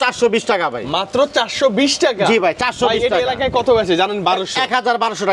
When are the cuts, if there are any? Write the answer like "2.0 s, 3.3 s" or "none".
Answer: none